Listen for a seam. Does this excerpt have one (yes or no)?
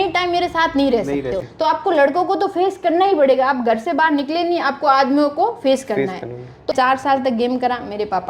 yes